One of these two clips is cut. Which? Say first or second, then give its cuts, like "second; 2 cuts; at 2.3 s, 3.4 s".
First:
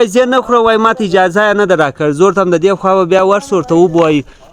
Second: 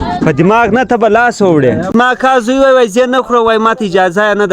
second; 1 cut; at 1.9 s